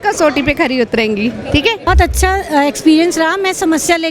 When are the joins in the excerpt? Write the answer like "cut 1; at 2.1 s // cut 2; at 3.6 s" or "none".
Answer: cut 1; at 1.9 s